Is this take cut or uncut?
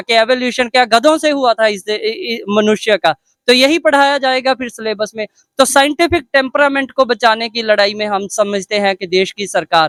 uncut